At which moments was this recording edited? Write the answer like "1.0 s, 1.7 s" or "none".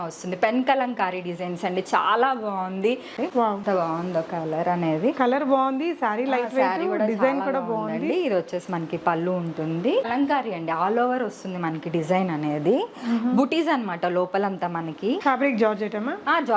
3.2 s, 10.1 s, 15.2 s